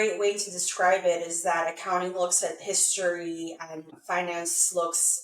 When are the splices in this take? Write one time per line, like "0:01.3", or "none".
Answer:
0:04.0